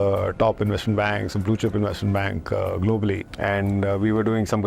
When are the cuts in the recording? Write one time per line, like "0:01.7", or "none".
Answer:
0:03.3